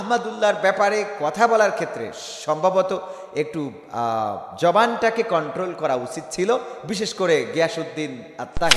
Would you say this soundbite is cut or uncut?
uncut